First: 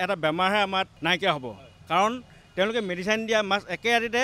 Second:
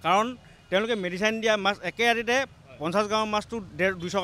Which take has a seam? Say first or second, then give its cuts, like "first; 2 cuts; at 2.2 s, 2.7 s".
first; 1 cut; at 0.9 s